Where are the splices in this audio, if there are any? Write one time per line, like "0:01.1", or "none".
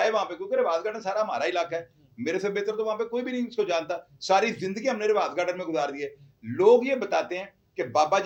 none